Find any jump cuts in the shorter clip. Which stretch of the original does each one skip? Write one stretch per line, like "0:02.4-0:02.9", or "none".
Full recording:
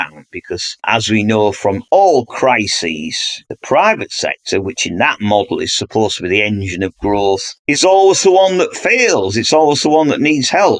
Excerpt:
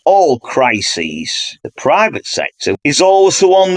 0:04.6-0:07.6